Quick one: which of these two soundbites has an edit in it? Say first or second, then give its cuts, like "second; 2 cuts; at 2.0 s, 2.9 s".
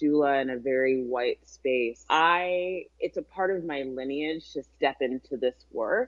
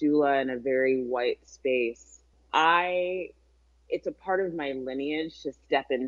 first; 2 cuts; at 2.0 s, 2.9 s